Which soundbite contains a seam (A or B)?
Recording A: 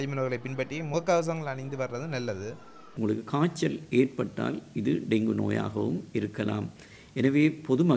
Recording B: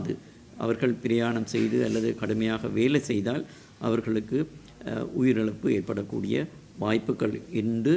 A